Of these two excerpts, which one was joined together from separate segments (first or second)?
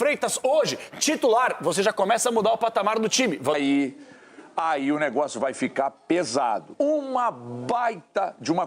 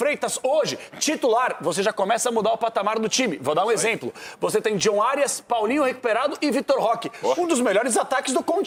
first